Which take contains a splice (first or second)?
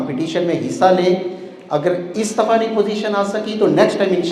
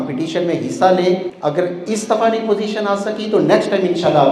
second